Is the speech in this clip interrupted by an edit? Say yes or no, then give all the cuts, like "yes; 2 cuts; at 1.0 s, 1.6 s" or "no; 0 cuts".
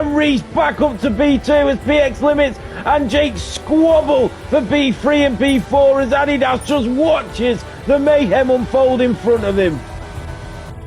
yes; 1 cut; at 9.8 s